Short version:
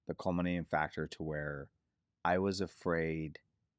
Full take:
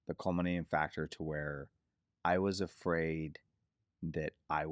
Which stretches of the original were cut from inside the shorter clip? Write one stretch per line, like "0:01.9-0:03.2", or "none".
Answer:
none